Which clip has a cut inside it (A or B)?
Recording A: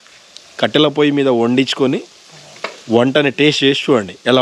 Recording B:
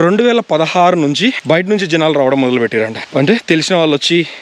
B